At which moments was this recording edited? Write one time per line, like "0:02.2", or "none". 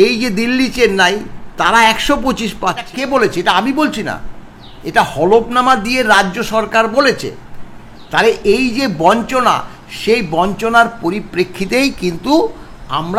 0:02.8